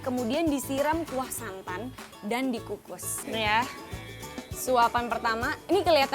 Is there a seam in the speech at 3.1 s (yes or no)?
yes